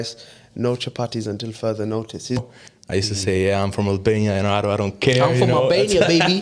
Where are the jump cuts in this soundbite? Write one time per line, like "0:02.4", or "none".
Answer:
0:02.4